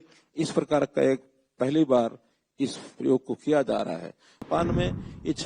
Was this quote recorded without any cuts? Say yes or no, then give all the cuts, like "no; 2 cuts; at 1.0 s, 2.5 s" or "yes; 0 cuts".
no; 1 cut; at 4.5 s